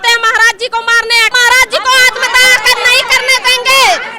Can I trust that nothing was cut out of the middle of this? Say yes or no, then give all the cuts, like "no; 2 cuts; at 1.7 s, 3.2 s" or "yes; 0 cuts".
no; 1 cut; at 1.3 s